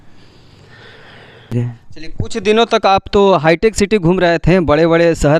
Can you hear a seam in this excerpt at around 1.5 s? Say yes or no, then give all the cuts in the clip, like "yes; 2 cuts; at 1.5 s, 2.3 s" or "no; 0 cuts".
yes; 1 cut; at 1.5 s